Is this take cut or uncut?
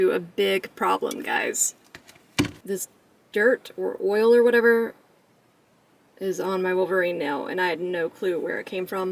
uncut